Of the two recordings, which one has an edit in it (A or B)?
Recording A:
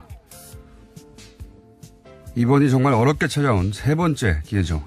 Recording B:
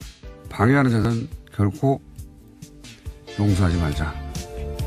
A